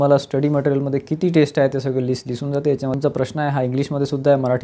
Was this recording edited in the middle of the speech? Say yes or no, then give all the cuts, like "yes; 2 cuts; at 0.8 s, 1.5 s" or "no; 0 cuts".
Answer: yes; 1 cut; at 2.7 s